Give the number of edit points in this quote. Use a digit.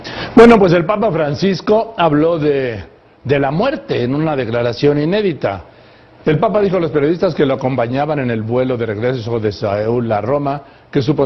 0